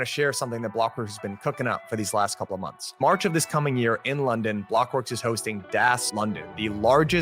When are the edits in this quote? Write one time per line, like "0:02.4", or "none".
0:06.1